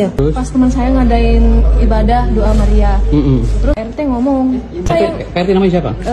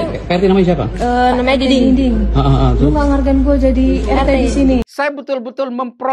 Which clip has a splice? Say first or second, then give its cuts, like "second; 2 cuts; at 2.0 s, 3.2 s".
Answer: second; 1 cut; at 4.9 s